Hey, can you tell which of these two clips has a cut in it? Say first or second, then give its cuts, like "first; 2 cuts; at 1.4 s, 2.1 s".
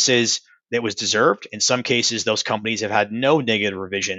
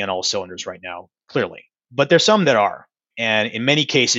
second; 2 cuts; at 1.8 s, 3.1 s